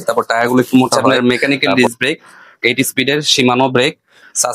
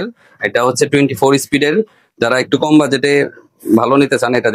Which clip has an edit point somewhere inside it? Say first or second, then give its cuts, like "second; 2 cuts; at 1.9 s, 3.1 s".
first; 1 cut; at 1.0 s